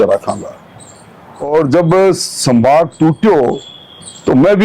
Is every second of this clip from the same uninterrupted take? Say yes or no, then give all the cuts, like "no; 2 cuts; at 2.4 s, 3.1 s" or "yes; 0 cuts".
yes; 0 cuts